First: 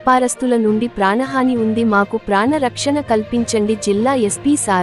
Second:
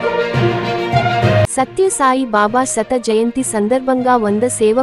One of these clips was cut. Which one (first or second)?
second